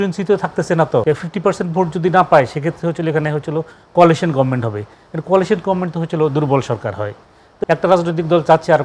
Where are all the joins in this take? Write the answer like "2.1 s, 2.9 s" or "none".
1.0 s, 7.5 s

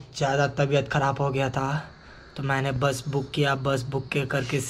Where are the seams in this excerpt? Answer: none

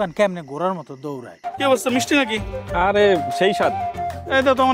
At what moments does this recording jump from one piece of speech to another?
1.4 s

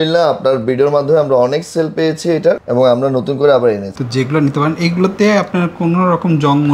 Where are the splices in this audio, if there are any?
3.9 s

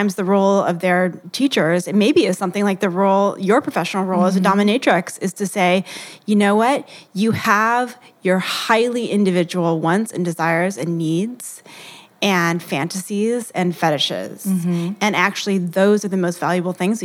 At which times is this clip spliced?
1.2 s

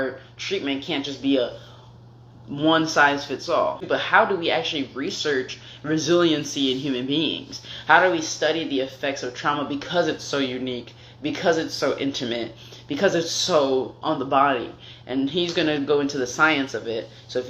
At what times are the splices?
3.8 s

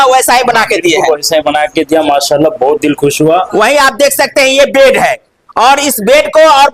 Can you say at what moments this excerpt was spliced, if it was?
3.5 s

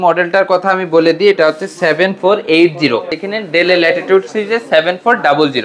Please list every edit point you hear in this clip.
3.2 s

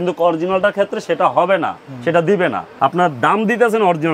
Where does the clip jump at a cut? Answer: 2.6 s

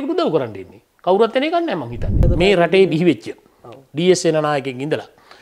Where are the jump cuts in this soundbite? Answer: 2.2 s

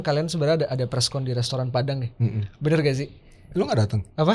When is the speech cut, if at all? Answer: none

